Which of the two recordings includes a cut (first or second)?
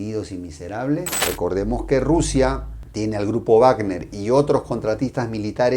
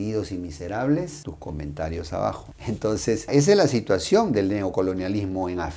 first